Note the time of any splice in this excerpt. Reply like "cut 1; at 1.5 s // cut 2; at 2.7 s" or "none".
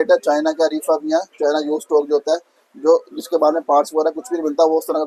none